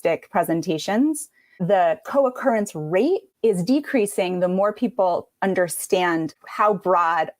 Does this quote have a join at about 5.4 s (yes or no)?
no